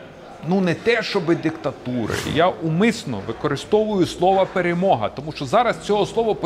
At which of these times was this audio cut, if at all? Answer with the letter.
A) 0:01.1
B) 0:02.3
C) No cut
B